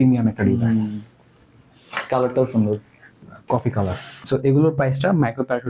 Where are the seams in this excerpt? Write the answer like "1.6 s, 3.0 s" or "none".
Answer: 3.3 s, 4.2 s